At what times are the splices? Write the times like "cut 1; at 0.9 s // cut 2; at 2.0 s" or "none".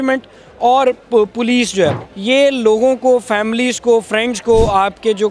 cut 1; at 2.1 s